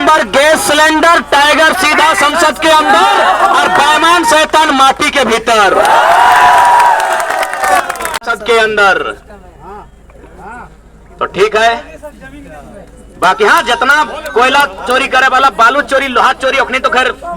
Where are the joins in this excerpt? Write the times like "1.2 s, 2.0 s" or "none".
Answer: 8.2 s